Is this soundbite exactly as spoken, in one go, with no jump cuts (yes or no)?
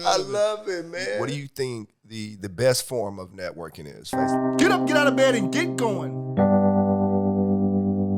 no